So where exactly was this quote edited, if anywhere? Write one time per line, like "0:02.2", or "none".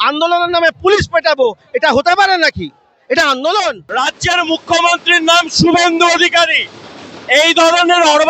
0:03.8